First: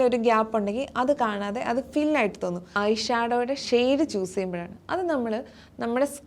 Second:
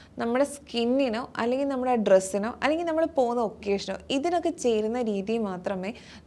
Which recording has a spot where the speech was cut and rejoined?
first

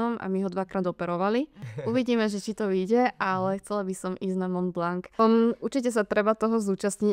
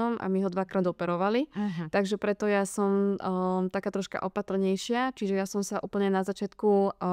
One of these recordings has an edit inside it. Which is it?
first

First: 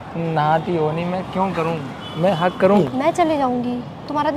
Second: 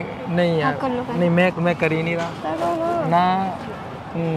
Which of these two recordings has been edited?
first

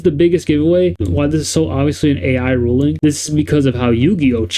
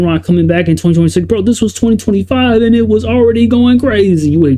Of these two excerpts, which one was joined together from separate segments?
first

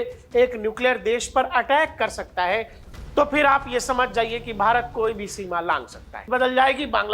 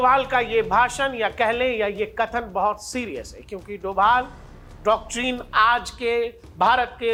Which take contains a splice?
first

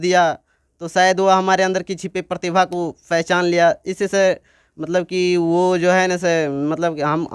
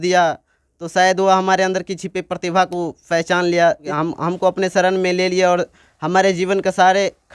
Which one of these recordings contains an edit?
second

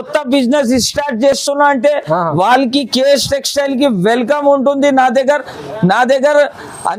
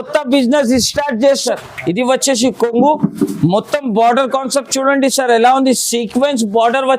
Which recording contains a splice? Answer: second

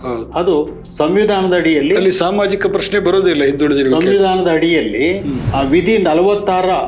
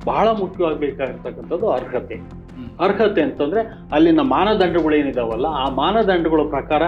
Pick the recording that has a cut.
first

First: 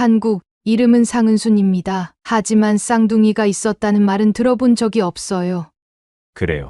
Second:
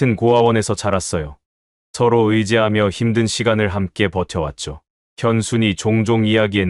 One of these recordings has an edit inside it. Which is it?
first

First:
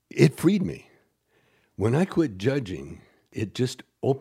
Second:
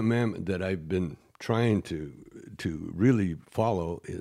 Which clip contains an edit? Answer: first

